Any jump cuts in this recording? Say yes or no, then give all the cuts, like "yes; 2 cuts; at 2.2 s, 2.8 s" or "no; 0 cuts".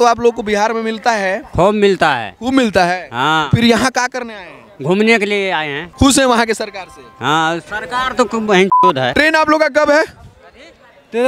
yes; 3 cuts; at 1.4 s, 5.8 s, 9.1 s